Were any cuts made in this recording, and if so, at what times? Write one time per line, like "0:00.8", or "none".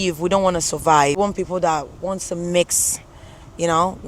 0:01.2